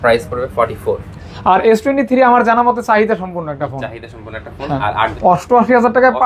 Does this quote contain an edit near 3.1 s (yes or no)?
no